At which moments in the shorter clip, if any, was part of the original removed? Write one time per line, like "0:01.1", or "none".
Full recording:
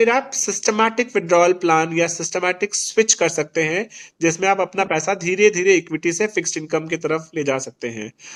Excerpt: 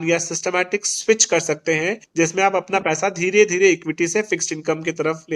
0:02.0